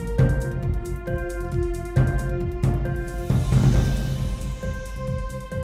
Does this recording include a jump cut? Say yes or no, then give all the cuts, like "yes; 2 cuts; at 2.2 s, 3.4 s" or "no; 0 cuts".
yes; 1 cut; at 4.7 s